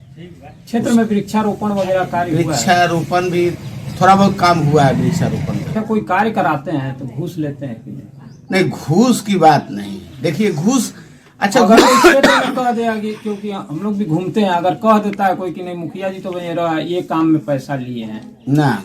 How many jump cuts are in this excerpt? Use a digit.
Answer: 1